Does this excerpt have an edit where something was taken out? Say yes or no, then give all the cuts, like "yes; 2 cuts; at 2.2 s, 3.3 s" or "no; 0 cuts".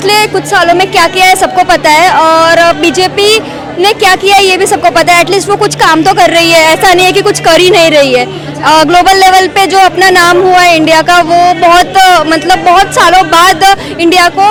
no; 0 cuts